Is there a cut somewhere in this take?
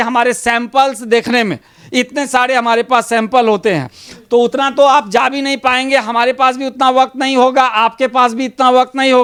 no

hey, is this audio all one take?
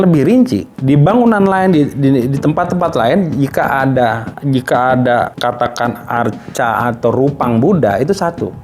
yes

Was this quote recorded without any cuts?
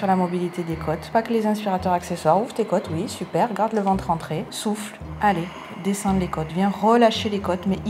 no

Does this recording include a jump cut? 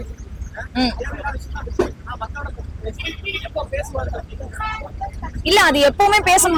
no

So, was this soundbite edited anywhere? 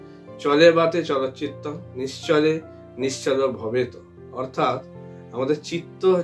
no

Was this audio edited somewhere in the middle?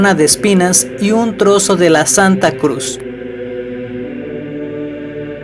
no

